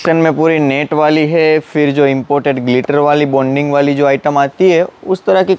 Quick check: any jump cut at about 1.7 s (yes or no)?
no